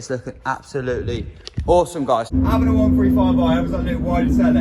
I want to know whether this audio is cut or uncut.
cut